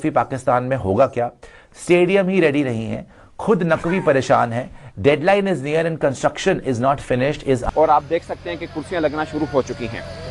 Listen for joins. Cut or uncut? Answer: cut